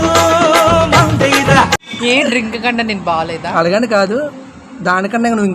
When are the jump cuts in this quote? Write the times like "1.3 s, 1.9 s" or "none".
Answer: none